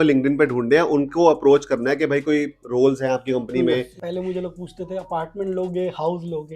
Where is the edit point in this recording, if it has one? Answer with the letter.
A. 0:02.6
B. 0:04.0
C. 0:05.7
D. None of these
B